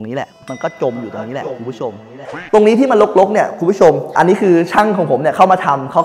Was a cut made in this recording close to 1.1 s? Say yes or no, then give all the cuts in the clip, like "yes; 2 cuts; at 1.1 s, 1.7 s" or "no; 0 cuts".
no; 2 cuts; at 2.3 s, 4.1 s